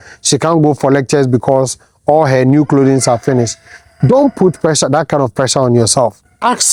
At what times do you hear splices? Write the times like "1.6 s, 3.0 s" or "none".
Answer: none